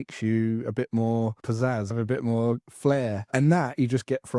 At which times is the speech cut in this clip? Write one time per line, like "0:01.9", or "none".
0:01.9
0:03.3